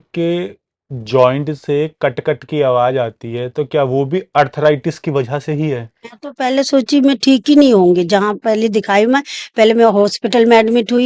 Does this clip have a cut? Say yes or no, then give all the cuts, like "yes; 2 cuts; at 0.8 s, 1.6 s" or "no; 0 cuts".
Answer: yes; 1 cut; at 6.1 s